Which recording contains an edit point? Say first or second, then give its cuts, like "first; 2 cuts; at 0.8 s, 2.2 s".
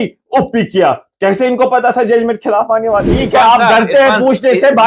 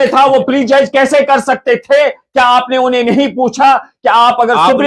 first; 1 cut; at 3.2 s